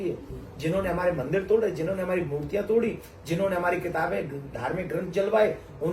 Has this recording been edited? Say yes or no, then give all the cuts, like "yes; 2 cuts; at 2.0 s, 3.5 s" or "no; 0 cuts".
no; 0 cuts